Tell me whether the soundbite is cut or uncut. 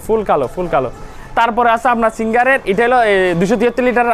uncut